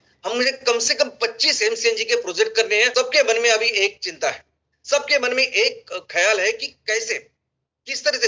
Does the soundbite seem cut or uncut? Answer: cut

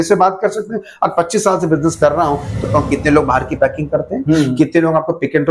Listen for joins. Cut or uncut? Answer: cut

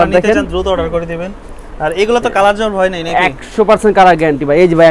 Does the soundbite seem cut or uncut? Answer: uncut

